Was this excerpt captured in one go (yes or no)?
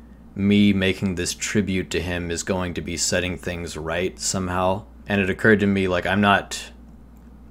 no